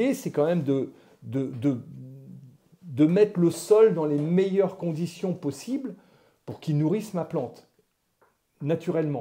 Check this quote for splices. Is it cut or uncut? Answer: uncut